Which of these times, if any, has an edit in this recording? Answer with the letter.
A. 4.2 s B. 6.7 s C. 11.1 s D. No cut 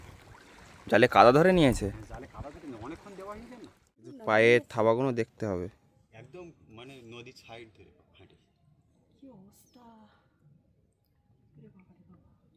A